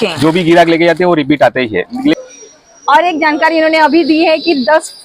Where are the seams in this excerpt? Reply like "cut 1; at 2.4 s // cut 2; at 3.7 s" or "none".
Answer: cut 1; at 2.2 s